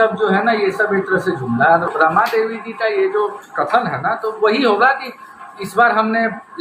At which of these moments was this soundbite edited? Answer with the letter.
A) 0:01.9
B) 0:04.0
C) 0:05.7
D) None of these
A